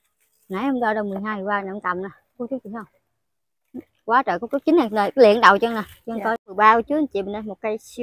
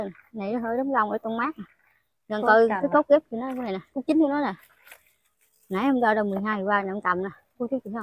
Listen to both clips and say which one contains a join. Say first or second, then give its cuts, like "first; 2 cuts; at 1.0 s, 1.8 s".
first; 1 cut; at 6.5 s